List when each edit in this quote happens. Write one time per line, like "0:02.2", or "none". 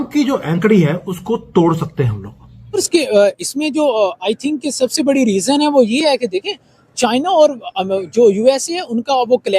0:02.8